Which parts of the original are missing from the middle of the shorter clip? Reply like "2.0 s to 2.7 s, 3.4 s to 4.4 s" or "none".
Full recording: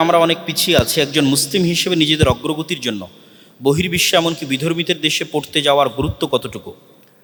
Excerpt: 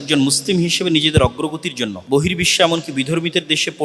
3.0 s to 3.5 s